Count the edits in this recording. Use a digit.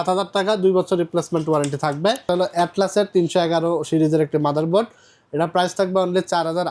1